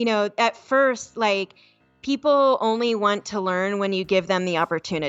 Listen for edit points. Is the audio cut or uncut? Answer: uncut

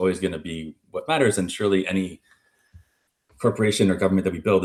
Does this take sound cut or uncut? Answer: uncut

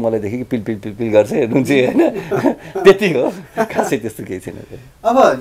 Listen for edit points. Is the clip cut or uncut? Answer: uncut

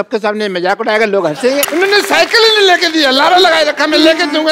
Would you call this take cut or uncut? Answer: cut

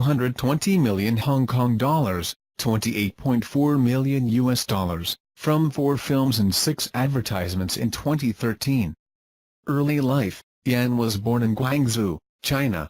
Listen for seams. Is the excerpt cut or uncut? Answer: uncut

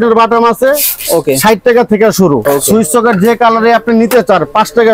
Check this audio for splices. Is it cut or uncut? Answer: cut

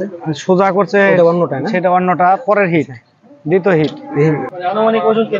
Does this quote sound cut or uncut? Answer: cut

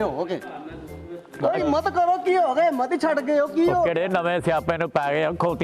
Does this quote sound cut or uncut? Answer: uncut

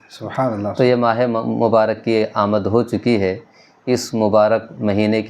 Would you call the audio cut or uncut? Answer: uncut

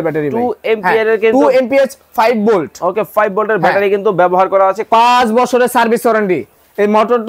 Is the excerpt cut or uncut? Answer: cut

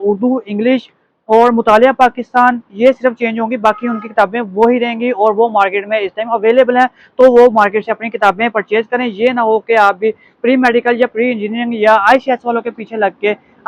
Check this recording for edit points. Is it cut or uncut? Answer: uncut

